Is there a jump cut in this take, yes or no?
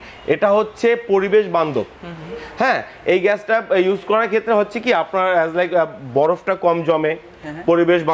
no